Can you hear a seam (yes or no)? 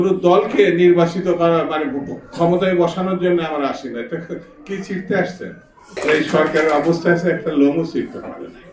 yes